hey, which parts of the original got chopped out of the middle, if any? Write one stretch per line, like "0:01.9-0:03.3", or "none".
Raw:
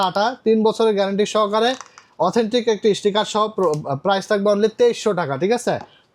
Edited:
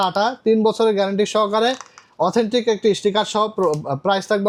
none